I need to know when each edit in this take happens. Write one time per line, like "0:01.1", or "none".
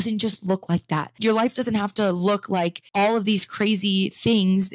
0:01.1
0:02.8